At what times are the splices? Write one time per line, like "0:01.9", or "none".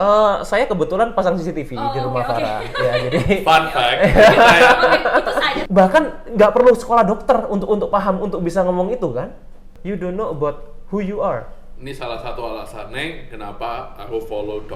0:05.6
0:09.7